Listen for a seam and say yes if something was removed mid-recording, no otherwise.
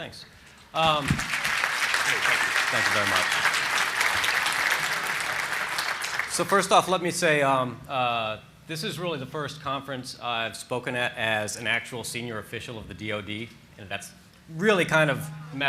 yes